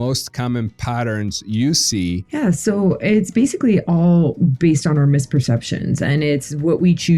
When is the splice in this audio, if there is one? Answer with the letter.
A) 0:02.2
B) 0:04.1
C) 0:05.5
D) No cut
A